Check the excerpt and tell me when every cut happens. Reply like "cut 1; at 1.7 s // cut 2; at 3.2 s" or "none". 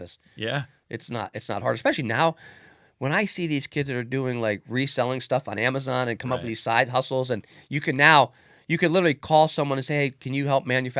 none